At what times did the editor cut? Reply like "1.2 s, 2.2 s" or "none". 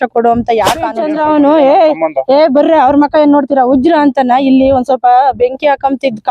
1.0 s